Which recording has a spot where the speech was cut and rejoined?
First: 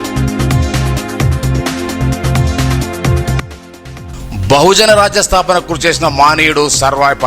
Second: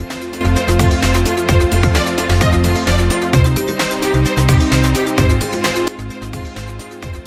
first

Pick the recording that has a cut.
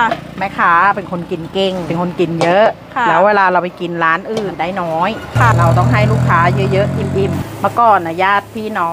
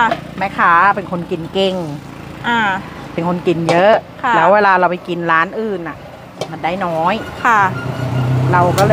first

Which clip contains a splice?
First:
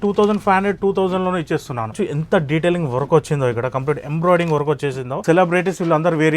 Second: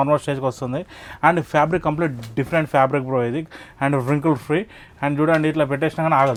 first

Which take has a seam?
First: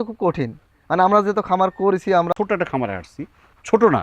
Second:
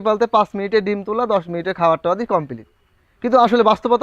first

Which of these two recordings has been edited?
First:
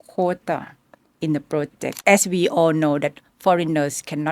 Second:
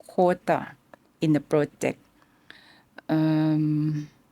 first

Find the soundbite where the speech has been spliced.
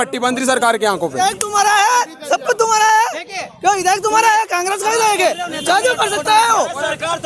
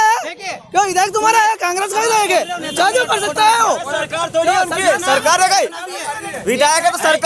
first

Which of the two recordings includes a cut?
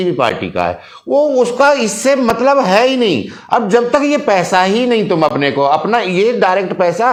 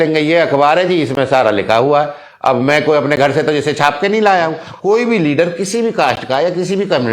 second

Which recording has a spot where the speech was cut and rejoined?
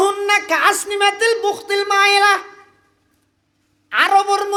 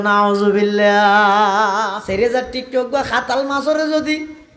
second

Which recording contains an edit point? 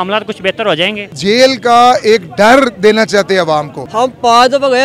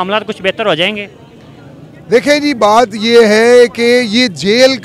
first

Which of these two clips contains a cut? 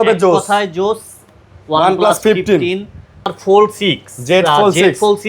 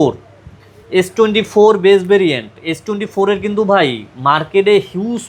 first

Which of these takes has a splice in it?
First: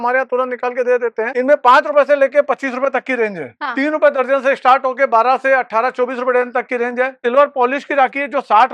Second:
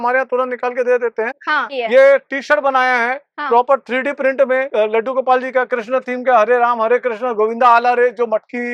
first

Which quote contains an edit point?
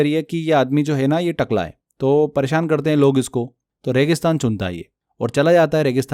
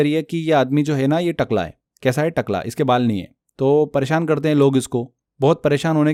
first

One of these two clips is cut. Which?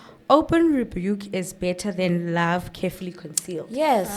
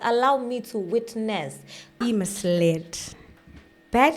second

